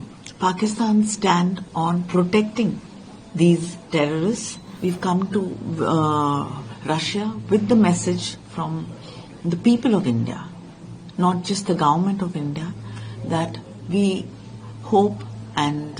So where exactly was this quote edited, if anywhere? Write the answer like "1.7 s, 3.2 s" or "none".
4.7 s